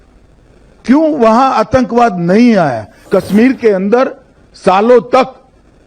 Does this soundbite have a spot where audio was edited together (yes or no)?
yes